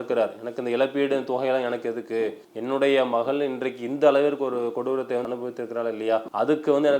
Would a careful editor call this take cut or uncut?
cut